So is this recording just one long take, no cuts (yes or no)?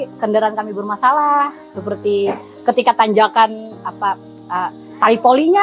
yes